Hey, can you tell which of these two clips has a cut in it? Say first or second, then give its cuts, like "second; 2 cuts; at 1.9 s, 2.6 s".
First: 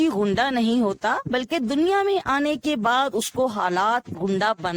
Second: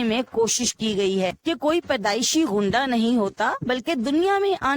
second; 1 cut; at 1.4 s